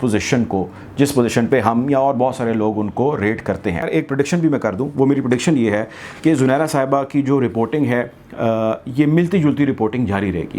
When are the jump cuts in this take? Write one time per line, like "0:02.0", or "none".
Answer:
0:03.9